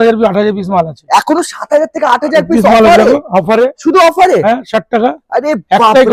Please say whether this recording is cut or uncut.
uncut